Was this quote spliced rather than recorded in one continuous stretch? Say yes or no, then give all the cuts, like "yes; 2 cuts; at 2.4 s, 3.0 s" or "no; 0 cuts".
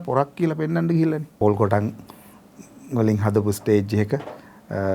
yes; 1 cut; at 1.3 s